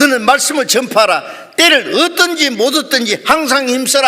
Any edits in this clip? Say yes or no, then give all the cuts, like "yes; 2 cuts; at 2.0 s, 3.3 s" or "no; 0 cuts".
no; 0 cuts